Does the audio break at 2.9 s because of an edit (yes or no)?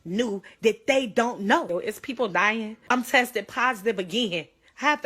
yes